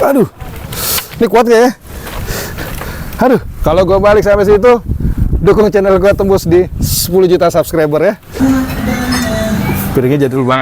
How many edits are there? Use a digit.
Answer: 1